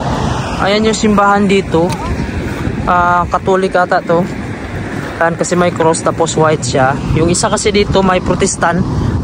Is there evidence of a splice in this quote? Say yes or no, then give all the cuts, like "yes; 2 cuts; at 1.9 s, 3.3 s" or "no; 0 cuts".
no; 0 cuts